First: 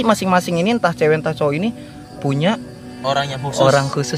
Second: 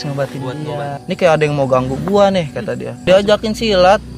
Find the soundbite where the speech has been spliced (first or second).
second